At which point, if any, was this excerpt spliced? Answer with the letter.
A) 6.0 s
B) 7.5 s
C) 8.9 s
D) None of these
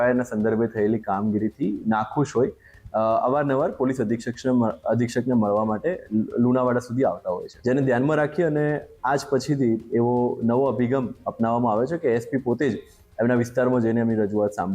B